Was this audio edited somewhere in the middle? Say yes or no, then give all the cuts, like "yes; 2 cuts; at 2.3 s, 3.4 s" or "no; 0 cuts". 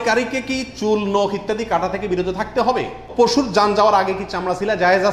yes; 1 cut; at 3.0 s